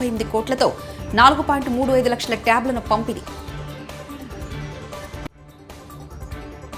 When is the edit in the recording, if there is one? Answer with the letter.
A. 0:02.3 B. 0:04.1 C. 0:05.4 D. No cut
D